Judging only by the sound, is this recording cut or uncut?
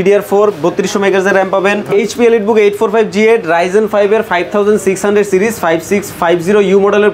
cut